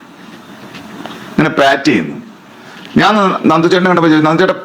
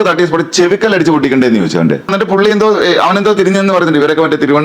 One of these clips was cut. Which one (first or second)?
second